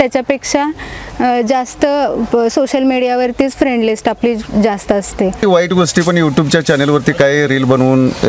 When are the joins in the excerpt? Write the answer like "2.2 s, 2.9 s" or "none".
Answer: 5.4 s